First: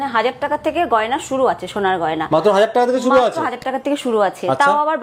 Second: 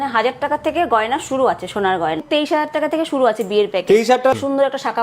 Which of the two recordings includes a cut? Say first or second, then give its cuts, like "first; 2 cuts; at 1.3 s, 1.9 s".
second; 2 cuts; at 2.2 s, 4.3 s